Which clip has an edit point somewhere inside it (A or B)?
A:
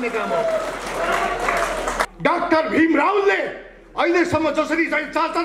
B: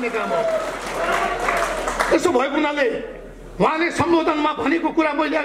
A